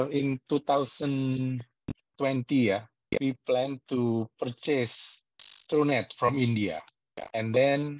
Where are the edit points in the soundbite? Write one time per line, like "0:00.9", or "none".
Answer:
none